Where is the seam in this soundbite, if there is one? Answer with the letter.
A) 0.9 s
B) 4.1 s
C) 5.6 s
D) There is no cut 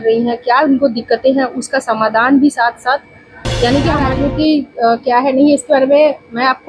B